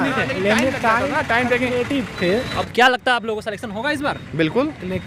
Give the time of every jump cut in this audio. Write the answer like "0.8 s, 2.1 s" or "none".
2.6 s